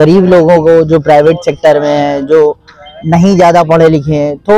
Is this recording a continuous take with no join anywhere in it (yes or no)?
yes